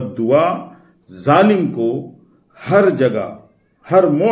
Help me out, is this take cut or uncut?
uncut